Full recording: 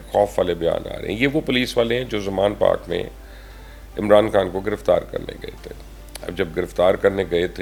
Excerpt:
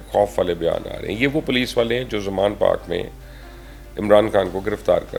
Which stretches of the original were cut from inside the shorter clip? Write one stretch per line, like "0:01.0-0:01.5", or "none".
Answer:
none